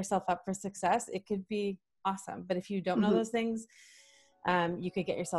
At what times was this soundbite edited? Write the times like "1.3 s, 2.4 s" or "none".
none